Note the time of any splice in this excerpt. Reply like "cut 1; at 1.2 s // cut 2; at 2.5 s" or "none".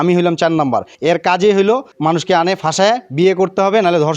cut 1; at 0.9 s // cut 2; at 1.9 s